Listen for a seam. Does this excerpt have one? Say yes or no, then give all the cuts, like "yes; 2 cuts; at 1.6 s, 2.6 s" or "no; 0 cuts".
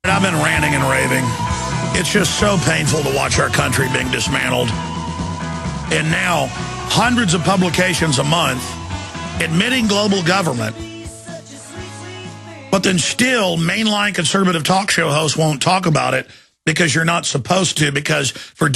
yes; 1 cut; at 12.5 s